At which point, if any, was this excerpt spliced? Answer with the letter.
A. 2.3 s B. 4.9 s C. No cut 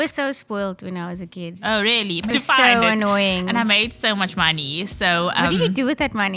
A